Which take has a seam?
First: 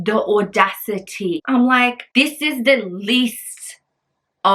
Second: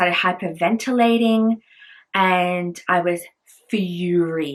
first; 2 cuts; at 1.4 s, 2.0 s

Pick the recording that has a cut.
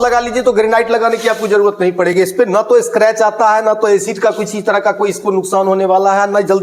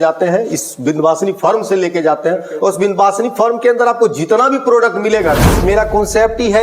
second; 1 cut; at 5.6 s

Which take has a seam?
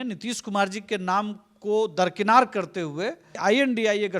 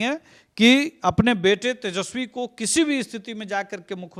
first; 1 cut; at 3.3 s

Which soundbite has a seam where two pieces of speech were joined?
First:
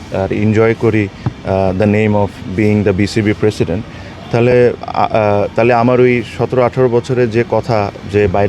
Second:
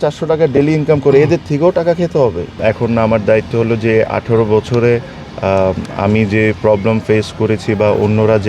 second; 1 cut; at 2.5 s

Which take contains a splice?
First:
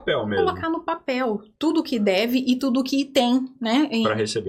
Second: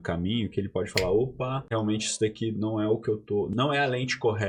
second; 2 cuts; at 1.6 s, 3.5 s

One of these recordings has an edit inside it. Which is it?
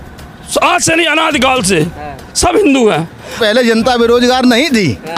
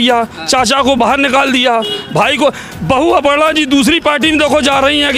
first; 1 cut; at 3.4 s

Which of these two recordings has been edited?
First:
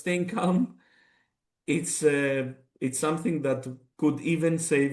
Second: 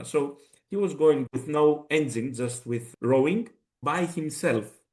second; 2 cuts; at 1.2 s, 3.8 s

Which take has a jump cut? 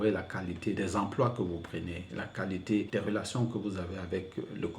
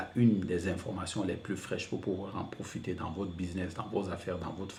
first; 2 cuts; at 0.8 s, 2.9 s

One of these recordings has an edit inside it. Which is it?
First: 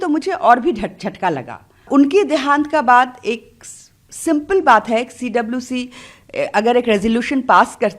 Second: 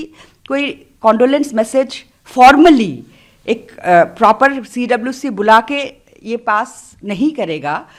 first; 1 cut; at 1.9 s

